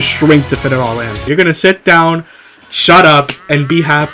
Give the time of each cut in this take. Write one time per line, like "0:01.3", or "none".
0:01.2